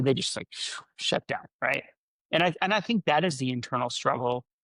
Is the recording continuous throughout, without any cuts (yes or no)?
yes